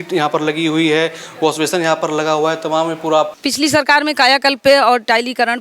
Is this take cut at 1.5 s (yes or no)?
no